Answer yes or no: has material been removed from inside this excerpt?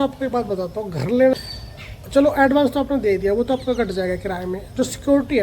yes